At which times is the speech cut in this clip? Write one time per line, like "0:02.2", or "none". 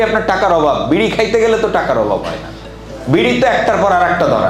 none